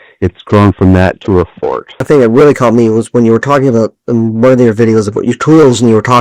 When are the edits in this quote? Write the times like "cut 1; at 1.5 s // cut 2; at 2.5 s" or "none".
cut 1; at 1.9 s